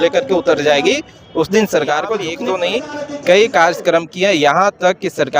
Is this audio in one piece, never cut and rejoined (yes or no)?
no